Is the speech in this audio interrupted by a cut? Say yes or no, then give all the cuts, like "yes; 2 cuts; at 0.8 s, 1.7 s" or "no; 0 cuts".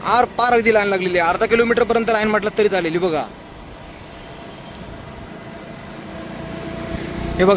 no; 0 cuts